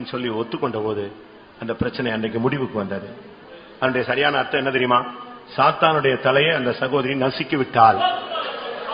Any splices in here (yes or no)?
no